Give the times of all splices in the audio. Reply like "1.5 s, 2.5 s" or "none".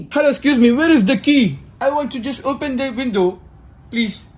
none